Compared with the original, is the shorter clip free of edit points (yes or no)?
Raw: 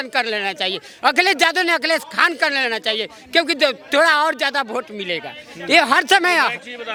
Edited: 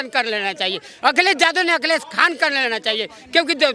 yes